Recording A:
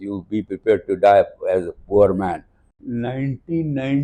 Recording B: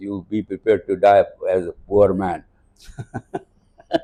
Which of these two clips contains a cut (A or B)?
A